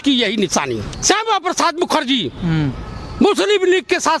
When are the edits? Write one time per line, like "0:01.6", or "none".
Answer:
0:00.9